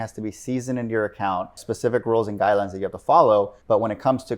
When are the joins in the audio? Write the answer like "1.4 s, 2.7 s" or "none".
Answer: 1.6 s, 3.6 s

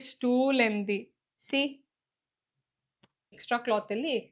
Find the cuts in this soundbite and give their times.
3.4 s

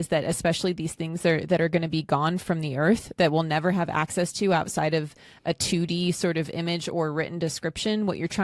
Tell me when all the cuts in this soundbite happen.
none

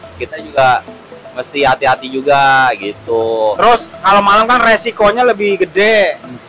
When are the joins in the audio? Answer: 3.6 s

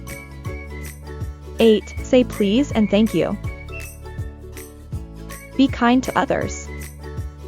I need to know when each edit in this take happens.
1.3 s, 3.4 s, 5.1 s, 6.5 s

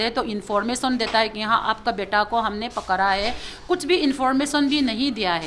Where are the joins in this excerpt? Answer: none

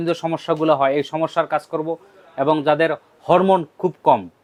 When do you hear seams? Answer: none

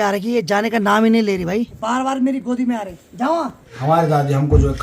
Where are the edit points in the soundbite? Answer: 1.8 s, 3.6 s

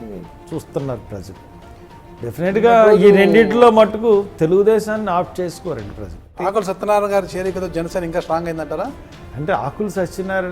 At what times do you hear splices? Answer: 6.3 s

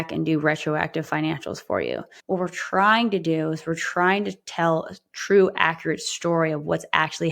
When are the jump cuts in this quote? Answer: 2.1 s

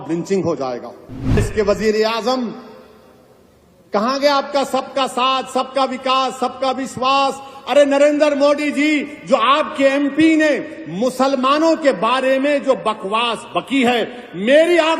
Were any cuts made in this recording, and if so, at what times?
1.4 s

